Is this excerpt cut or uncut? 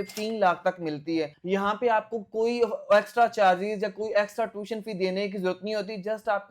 uncut